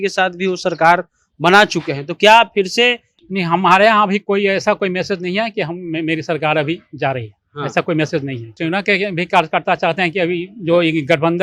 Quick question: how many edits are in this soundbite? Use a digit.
2